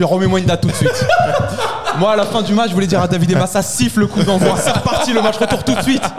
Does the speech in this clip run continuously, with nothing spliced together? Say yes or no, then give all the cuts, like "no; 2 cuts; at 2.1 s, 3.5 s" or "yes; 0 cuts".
yes; 0 cuts